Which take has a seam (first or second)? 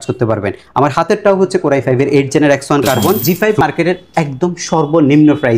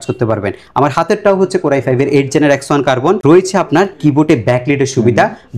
first